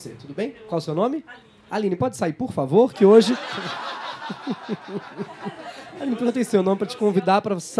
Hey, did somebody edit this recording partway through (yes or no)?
no